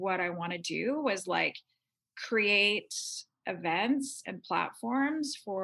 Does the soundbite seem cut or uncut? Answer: uncut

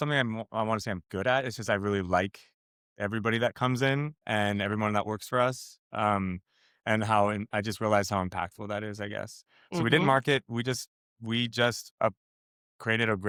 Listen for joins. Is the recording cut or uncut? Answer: uncut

